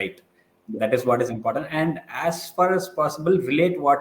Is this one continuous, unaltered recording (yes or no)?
yes